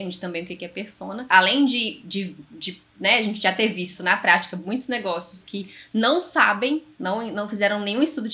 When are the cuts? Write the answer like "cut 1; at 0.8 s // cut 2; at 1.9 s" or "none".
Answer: cut 1; at 1.2 s